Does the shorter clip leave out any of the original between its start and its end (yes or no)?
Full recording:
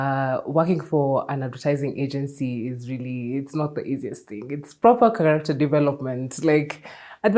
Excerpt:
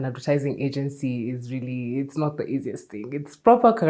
no